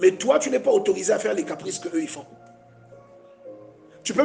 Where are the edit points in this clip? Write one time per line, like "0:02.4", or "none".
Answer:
0:03.3